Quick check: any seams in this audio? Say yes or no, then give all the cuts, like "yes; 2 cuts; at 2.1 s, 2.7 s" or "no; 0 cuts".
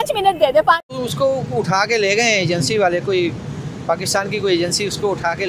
yes; 1 cut; at 0.9 s